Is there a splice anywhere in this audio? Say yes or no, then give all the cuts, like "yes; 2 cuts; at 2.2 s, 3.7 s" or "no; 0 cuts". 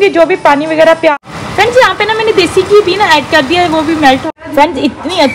yes; 2 cuts; at 1.1 s, 4.2 s